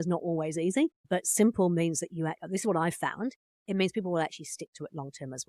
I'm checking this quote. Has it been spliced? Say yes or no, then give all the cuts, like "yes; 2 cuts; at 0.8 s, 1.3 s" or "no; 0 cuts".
yes; 1 cut; at 1.0 s